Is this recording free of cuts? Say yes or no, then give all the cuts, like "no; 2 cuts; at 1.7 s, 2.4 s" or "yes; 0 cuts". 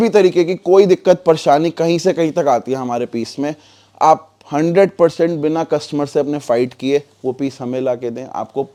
yes; 0 cuts